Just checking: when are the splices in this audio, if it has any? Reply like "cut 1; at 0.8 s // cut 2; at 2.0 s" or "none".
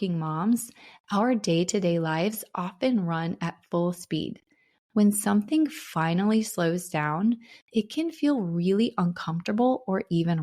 cut 1; at 7.5 s